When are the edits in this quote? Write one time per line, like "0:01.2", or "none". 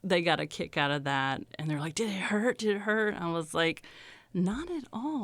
0:01.5